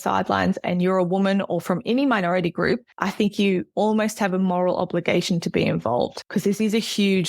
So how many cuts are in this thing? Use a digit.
2